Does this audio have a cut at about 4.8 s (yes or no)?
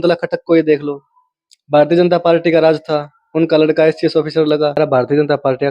yes